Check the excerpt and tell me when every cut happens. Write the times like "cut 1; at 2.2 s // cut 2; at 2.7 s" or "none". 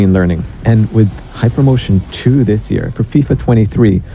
none